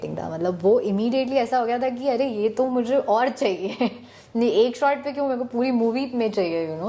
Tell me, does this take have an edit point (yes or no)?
no